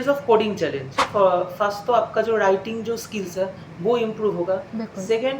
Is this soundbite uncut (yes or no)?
no